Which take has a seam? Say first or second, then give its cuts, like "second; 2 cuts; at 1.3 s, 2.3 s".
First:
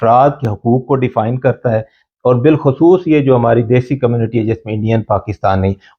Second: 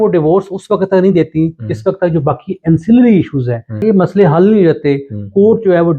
second; 1 cut; at 3.8 s